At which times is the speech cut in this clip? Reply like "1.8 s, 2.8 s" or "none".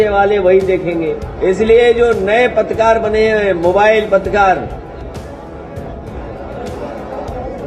1.2 s